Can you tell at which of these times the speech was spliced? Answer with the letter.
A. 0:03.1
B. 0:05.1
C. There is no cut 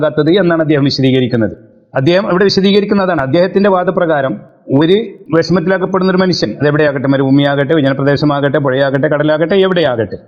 A